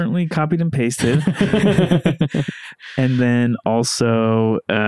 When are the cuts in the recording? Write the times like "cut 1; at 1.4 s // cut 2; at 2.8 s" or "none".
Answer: none